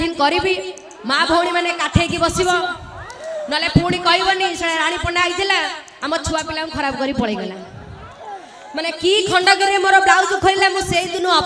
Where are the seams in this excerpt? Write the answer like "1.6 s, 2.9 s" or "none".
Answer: none